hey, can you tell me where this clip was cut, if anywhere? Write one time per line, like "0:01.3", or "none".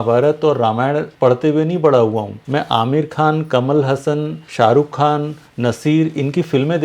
0:01.1
0:02.3
0:04.4

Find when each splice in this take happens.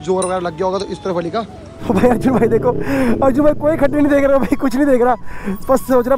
0:01.8

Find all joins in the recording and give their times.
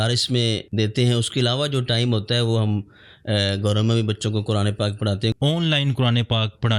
0:05.3

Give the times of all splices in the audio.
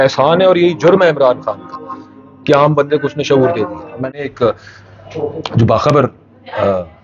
0:04.1

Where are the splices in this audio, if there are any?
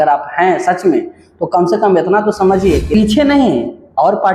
0:02.9

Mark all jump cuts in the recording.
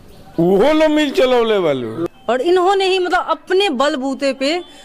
0:02.0

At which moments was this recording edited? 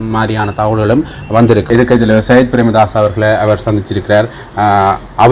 0:01.7

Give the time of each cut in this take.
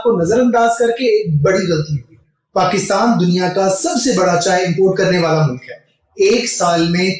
0:02.2

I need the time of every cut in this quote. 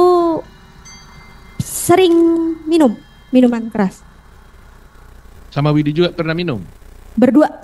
none

